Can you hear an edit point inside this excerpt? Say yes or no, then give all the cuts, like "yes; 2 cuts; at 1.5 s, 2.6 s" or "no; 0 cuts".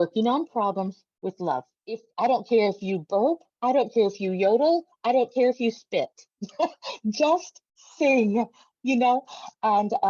yes; 1 cut; at 2.1 s